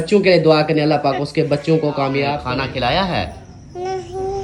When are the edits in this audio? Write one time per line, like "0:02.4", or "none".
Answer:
0:02.4